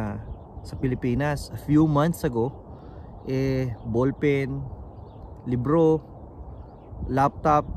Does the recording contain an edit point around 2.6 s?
no; 0 cuts

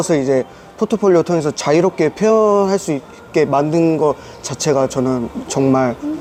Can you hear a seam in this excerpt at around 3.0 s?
no; 0 cuts

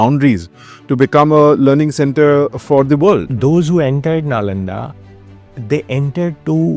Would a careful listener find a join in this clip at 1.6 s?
no; 1 cut; at 3.3 s

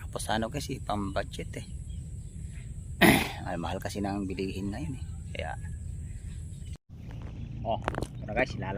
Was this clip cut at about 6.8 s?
yes; 1 cut; at 6.8 s

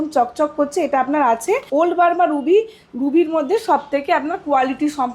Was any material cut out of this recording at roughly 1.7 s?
yes; 1 cut; at 1.7 s

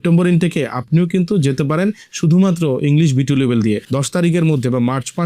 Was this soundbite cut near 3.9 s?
yes; 1 cut; at 3.9 s

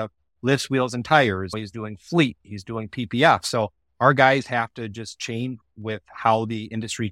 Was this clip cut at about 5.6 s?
yes; 2 cuts; at 1.6 s, 5.6 s

